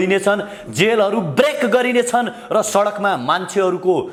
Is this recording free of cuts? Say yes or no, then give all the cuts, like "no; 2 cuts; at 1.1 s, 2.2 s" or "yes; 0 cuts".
yes; 0 cuts